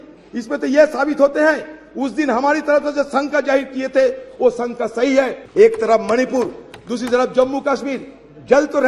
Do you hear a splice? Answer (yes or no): yes